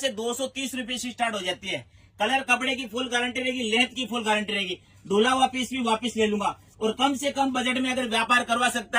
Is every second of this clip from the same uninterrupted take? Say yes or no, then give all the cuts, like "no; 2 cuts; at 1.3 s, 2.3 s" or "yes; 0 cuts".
yes; 0 cuts